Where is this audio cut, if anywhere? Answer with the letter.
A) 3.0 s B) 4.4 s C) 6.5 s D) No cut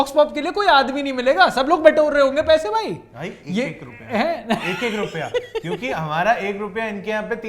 D